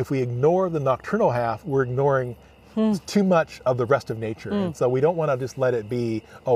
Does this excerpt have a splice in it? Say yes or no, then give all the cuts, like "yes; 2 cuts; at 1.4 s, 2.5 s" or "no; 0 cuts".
no; 0 cuts